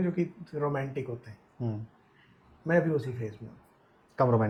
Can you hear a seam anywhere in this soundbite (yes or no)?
no